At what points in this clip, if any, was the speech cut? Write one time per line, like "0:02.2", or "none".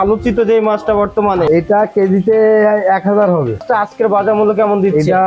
0:01.5
0:03.6